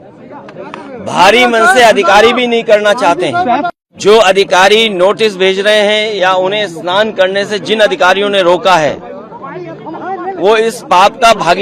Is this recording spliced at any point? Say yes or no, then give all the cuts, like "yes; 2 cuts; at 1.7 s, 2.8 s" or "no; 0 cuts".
yes; 1 cut; at 3.7 s